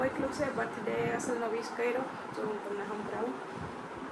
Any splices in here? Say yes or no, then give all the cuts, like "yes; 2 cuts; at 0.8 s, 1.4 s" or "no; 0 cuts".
no; 0 cuts